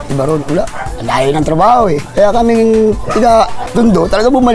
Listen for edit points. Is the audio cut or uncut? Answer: cut